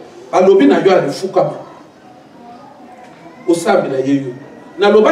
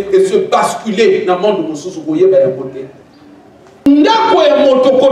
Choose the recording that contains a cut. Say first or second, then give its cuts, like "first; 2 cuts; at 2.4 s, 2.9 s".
second; 1 cut; at 3.9 s